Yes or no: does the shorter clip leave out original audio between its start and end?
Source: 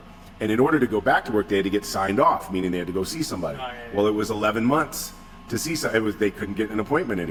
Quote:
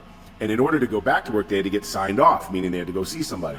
no